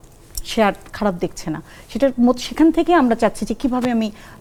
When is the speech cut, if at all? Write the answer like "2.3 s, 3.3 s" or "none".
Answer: none